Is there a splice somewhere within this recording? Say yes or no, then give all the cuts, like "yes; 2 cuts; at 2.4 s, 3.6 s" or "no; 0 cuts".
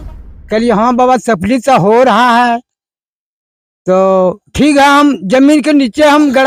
no; 0 cuts